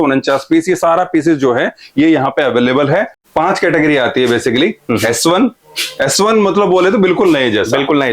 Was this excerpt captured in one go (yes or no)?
no